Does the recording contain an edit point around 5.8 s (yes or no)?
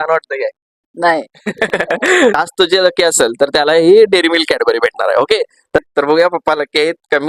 yes